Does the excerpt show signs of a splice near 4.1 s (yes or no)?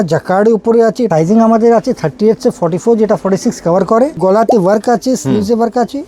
yes